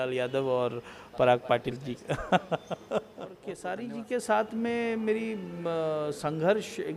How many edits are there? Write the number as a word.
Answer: one